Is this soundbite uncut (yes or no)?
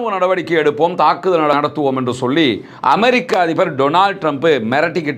no